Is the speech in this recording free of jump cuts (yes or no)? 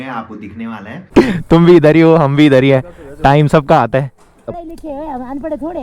no